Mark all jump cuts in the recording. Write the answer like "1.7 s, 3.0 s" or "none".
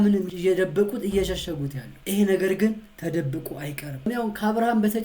4.0 s